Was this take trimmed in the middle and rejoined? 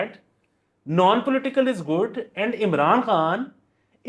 no; 0 cuts

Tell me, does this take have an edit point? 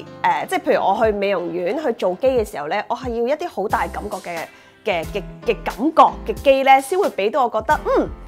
no; 0 cuts

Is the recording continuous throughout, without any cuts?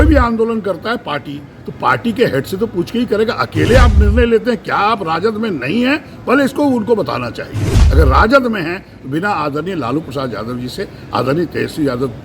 yes; 0 cuts

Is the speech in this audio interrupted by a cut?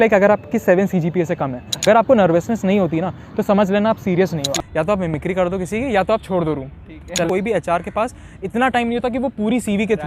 yes; 3 cuts; at 1.8 s, 4.5 s, 7.3 s

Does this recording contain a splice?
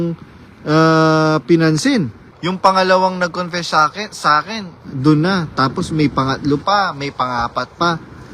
yes; 1 cut; at 2.2 s

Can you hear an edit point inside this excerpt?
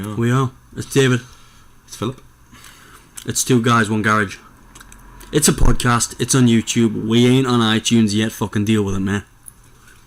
yes; 1 cut; at 7.2 s

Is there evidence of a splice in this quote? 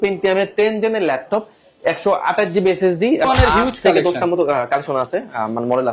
yes; 1 cut; at 3.3 s

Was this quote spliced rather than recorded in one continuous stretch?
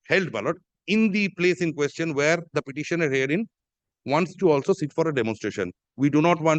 no; 0 cuts

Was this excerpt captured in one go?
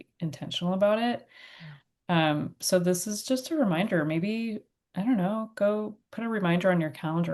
yes; 0 cuts

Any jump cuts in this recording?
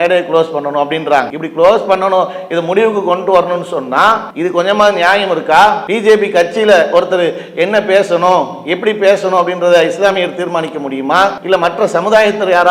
yes; 4 cuts; at 1.4 s, 4.3 s, 5.9 s, 11.4 s

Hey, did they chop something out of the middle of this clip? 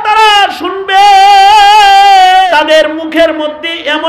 yes; 1 cut; at 2.5 s

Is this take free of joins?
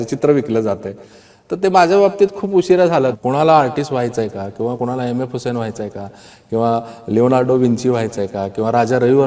no; 1 cut; at 3.2 s

